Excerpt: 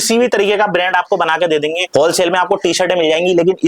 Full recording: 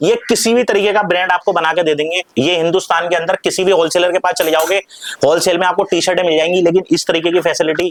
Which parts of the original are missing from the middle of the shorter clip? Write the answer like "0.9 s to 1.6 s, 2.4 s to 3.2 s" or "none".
2.2 s to 5.1 s